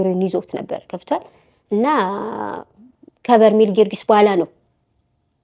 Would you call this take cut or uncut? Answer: uncut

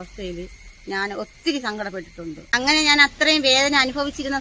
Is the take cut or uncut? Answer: cut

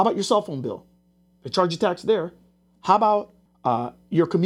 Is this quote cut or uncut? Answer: cut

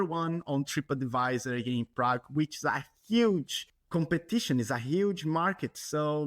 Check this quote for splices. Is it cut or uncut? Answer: uncut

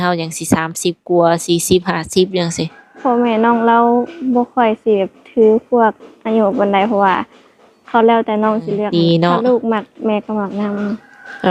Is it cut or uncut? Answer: cut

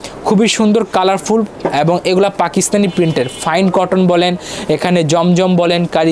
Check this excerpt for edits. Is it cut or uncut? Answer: uncut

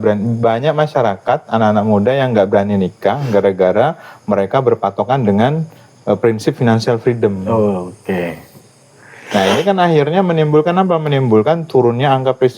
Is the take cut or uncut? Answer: uncut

